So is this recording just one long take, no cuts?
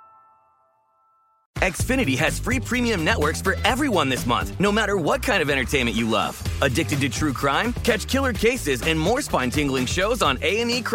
no; 1 cut; at 1.4 s

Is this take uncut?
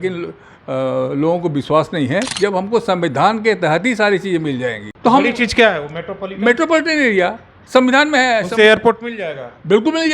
no; 2 cuts; at 2.3 s, 4.8 s

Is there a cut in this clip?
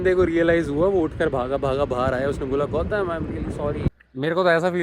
yes; 1 cut; at 3.9 s

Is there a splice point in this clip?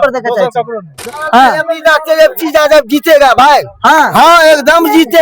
yes; 1 cut; at 1.0 s

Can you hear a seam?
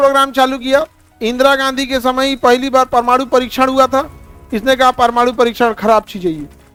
no; 0 cuts

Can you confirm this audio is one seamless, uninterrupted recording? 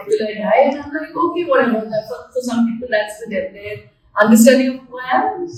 yes; 0 cuts

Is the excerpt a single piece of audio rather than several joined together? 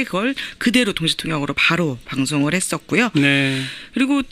yes; 0 cuts

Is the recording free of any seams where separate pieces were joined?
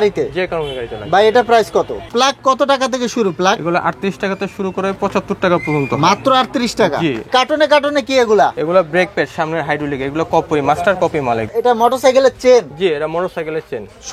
no; 3 cuts; at 2.0 s, 7.2 s, 11.5 s

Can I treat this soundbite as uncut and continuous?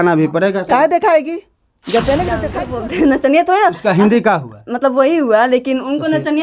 no; 1 cut; at 2.6 s

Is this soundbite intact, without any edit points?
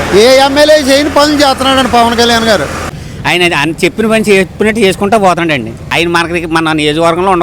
no; 2 cuts; at 2.9 s, 5.9 s

